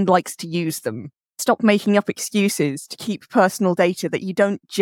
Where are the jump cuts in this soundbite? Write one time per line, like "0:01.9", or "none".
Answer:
0:01.4